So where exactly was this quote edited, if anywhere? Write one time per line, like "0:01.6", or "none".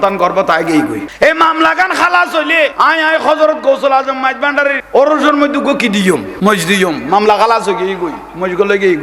0:01.1
0:02.7
0:04.8
0:06.3

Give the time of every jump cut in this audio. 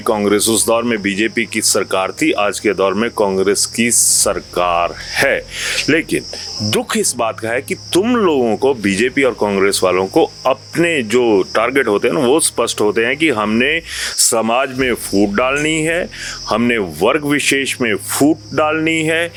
none

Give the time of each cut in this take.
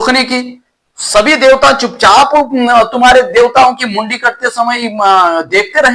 none

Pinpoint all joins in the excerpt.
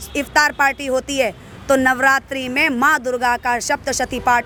none

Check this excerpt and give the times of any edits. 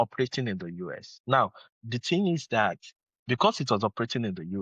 0:01.1

